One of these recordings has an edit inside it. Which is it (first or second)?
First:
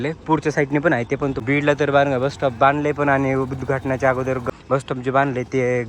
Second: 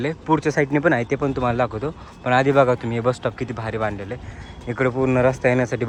first